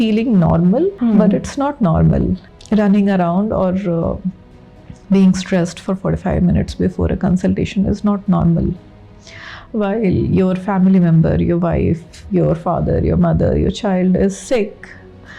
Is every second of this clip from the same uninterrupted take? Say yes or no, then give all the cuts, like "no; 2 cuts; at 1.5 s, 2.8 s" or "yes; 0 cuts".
no; 2 cuts; at 1.0 s, 2.5 s